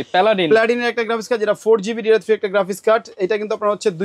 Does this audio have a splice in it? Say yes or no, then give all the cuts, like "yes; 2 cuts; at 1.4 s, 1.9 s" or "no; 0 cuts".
no; 0 cuts